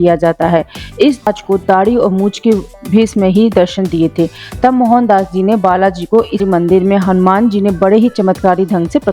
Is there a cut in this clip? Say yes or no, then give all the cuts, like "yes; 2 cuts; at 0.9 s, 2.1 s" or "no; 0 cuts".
yes; 2 cuts; at 1.3 s, 6.4 s